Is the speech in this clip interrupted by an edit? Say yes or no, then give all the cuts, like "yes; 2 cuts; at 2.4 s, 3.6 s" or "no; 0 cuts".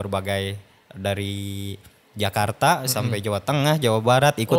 no; 0 cuts